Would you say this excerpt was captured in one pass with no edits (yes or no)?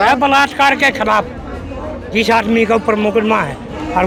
yes